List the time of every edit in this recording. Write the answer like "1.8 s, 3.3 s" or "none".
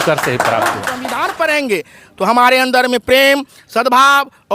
1.0 s